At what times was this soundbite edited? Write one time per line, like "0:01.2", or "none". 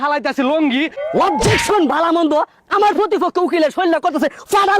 0:01.0